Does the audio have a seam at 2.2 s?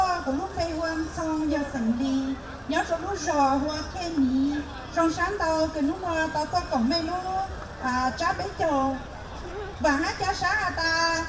yes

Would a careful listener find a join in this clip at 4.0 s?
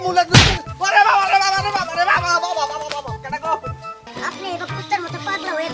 yes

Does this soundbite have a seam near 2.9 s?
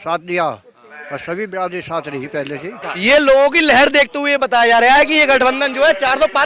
yes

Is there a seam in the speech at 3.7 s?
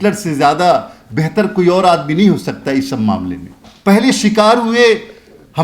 yes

